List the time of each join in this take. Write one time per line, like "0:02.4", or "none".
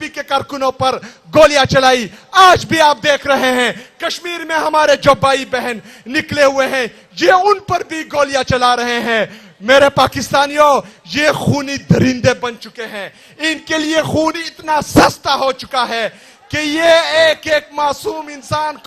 none